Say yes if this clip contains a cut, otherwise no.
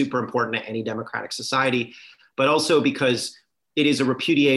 no